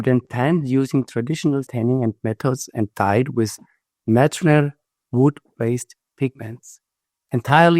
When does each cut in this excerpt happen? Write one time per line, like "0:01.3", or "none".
0:01.7